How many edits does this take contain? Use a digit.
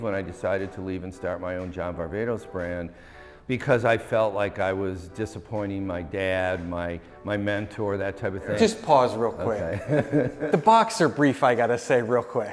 1